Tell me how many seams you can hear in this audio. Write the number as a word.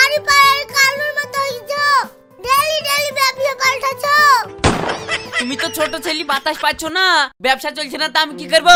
zero